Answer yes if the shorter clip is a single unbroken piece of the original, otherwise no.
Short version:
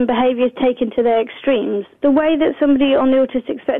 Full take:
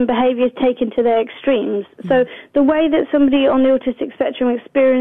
no